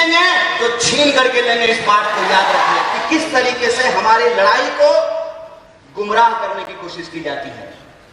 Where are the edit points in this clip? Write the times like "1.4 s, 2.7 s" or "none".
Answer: 2.9 s

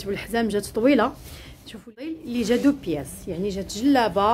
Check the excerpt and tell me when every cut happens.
1.8 s

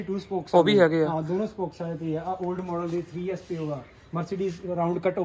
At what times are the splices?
none

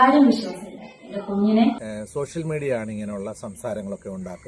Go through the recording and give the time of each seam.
1.8 s

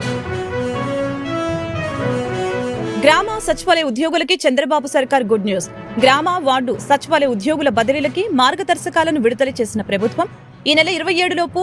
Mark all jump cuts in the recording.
2.8 s

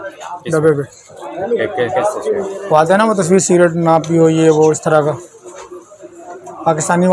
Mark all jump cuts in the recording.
none

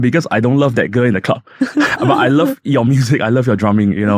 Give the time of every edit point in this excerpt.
none

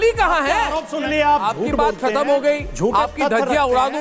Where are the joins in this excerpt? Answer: 1.1 s

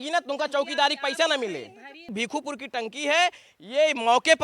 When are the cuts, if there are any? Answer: 2.1 s

